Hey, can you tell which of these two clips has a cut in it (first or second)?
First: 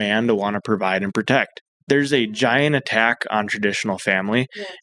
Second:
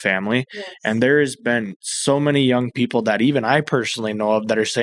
first